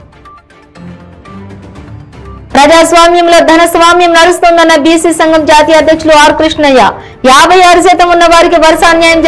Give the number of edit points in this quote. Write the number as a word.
zero